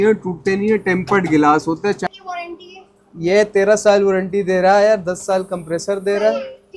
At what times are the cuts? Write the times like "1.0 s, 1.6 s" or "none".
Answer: 2.0 s